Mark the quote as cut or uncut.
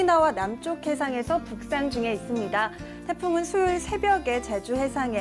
cut